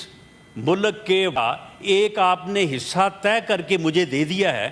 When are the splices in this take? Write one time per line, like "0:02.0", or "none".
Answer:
0:01.4